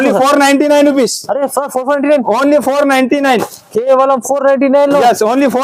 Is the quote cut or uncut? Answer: uncut